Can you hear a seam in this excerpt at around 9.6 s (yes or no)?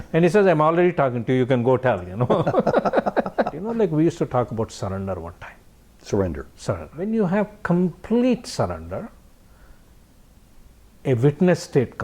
no